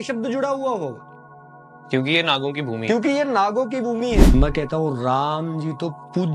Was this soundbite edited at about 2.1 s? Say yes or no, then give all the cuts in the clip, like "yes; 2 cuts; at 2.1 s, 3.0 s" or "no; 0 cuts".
no; 1 cut; at 4.2 s